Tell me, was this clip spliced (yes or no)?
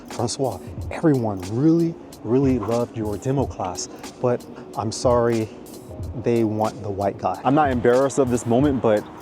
yes